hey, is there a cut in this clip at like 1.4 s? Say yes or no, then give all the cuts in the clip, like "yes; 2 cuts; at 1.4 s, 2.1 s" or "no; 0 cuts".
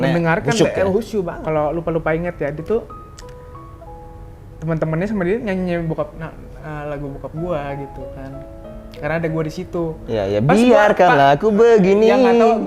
yes; 1 cut; at 1.4 s